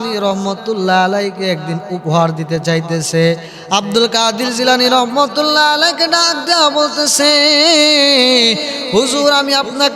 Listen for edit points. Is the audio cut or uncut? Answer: uncut